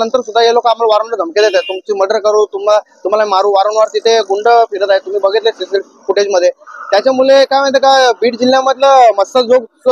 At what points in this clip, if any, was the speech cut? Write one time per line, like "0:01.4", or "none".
none